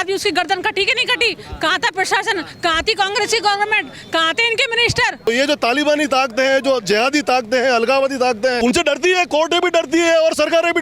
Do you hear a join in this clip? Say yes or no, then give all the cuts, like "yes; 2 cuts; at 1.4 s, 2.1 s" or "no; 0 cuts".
yes; 2 cuts; at 5.3 s, 8.6 s